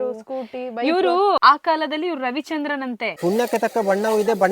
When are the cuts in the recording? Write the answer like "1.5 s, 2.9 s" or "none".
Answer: 1.4 s, 3.1 s